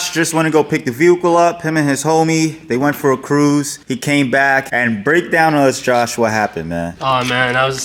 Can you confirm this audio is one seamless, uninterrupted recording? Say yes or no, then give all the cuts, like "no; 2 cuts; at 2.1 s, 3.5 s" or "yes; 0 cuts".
yes; 0 cuts